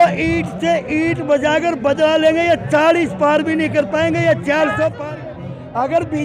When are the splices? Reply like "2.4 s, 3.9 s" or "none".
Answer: 5.0 s